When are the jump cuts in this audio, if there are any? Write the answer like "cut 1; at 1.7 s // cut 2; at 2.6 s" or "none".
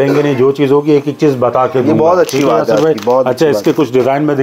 none